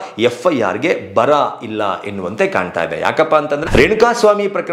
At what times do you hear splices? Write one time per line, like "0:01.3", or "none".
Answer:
0:03.6